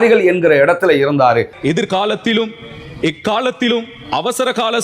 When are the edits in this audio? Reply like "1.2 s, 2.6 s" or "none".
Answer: 1.6 s